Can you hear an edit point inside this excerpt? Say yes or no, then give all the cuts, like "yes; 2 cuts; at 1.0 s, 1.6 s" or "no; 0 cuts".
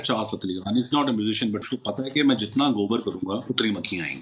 yes; 1 cut; at 1.6 s